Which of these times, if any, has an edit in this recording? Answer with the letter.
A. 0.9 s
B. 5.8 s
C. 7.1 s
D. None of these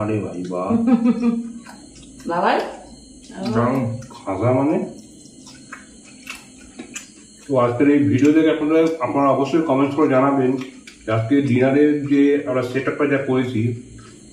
C